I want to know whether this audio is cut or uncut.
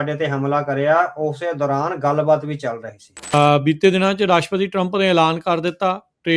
cut